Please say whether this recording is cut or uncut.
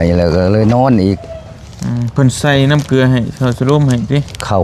uncut